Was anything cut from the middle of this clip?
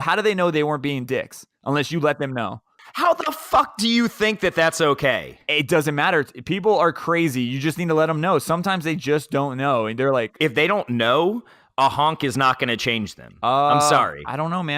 yes; 1 cut; at 10.3 s

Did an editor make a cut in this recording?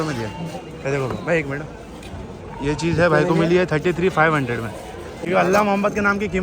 yes; 1 cut; at 5.2 s

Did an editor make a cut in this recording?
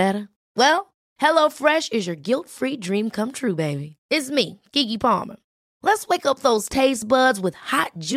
no; 0 cuts

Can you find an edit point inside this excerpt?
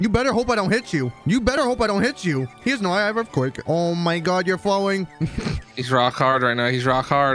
yes; 2 cuts; at 1.5 s, 3.6 s

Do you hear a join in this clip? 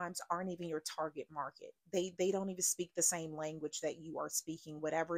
no; 0 cuts

